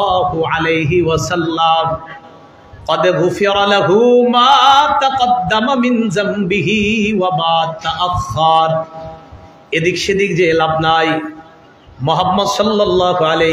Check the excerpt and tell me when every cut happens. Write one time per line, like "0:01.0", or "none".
none